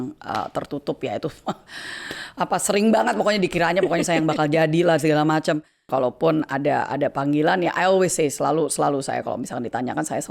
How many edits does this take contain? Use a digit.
1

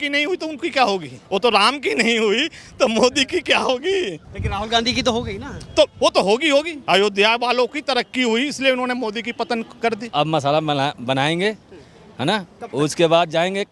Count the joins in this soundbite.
4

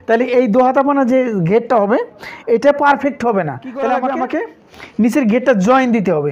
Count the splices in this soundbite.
1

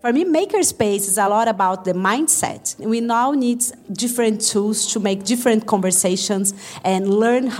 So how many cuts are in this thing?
3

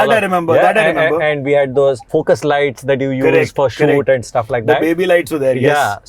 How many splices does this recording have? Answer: 1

